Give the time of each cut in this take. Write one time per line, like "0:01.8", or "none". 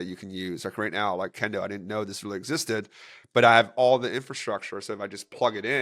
none